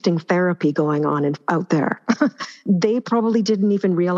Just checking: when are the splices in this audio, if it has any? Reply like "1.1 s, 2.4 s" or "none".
1.4 s, 2.6 s